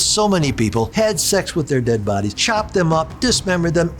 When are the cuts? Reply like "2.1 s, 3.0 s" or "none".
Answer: 0.9 s, 2.4 s